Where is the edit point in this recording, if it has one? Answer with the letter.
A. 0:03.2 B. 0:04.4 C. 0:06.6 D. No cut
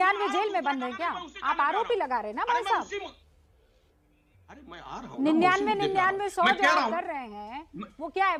D